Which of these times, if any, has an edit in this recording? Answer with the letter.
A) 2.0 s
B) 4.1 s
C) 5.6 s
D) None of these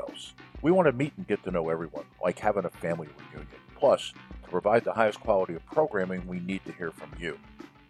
C